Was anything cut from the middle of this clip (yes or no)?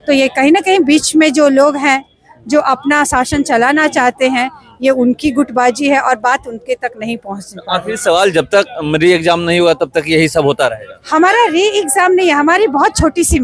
no